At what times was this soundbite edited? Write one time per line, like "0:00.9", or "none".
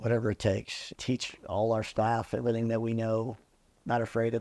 0:01.0